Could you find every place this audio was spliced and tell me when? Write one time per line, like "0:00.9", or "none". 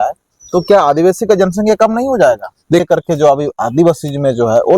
0:02.8